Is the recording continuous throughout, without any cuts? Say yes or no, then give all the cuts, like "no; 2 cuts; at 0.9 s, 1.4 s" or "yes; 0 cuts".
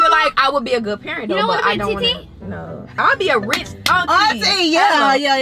yes; 0 cuts